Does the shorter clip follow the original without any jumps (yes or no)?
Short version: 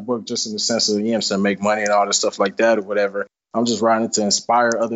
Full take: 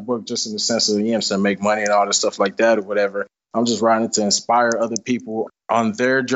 yes